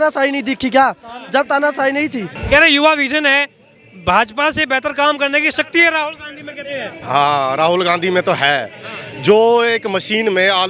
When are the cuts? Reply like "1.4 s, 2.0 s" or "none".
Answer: 2.3 s